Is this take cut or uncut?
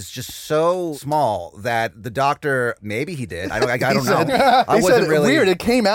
cut